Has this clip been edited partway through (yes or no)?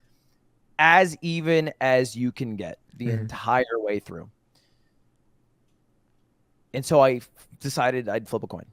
no